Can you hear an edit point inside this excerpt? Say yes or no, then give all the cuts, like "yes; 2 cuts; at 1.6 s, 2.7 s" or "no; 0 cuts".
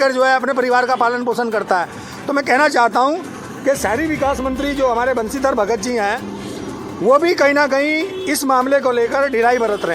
no; 0 cuts